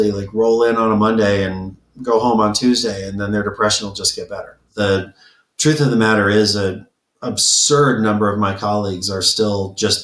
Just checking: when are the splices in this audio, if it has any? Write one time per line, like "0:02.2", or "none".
0:04.7